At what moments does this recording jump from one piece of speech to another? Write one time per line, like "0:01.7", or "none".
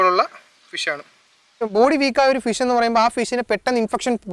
0:01.6